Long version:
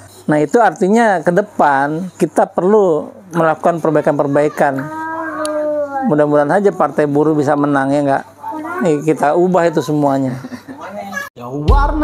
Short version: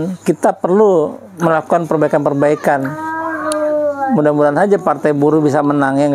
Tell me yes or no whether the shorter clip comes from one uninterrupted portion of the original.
yes